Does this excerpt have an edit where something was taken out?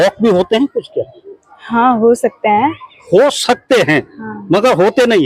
no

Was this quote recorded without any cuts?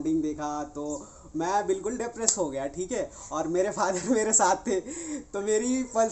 yes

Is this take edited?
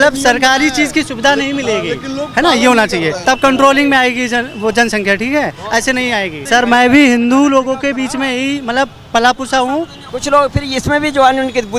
yes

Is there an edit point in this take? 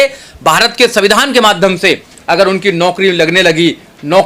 no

